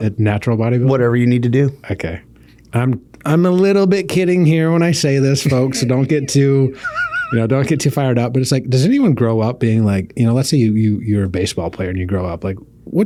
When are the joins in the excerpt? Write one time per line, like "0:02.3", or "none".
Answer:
none